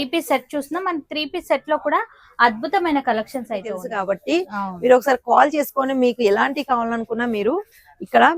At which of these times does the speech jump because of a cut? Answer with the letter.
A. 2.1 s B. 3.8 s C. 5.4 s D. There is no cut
B